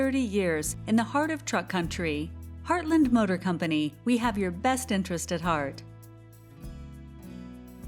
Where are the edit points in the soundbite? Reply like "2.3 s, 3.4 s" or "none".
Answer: 5.8 s

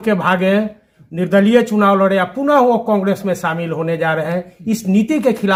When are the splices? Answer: none

